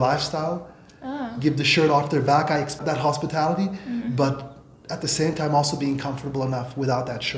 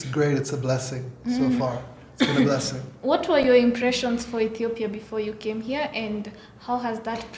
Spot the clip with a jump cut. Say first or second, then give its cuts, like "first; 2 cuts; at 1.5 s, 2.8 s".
first; 1 cut; at 2.8 s